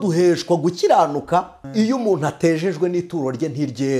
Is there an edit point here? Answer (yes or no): yes